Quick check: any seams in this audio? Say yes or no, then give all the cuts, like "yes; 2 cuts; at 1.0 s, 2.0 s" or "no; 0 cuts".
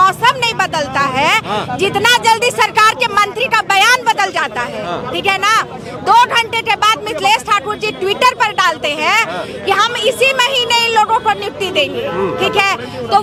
no; 0 cuts